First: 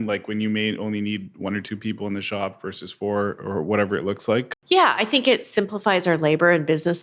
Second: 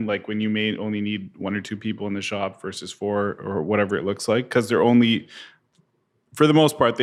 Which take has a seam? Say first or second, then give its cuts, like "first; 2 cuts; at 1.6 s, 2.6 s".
first; 1 cut; at 4.5 s